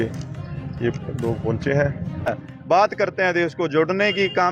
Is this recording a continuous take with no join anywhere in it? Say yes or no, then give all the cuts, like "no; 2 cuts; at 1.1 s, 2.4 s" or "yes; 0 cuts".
no; 1 cut; at 2.4 s